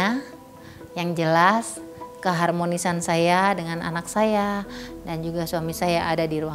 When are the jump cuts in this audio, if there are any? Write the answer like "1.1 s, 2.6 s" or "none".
none